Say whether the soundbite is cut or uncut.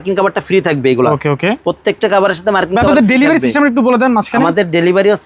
uncut